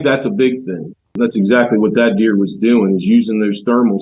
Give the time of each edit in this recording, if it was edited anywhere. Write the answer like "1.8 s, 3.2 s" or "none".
1.1 s